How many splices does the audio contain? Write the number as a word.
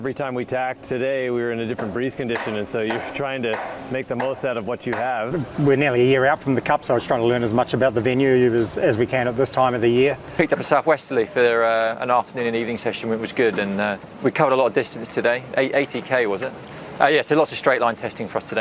four